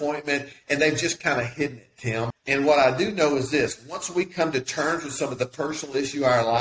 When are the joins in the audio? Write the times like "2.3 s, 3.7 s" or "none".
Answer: 2.3 s